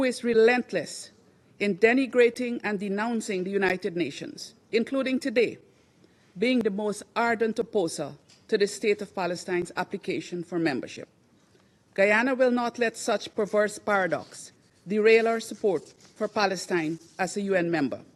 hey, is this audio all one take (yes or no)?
yes